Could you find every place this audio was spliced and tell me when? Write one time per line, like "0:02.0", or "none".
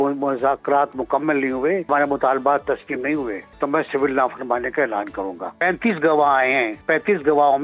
0:01.9
0:03.4
0:05.5
0:06.8